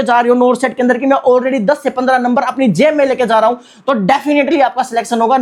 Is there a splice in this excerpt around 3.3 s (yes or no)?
no